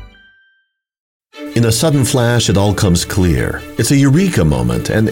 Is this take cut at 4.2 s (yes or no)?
no